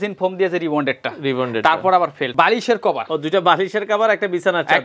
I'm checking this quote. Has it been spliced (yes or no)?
yes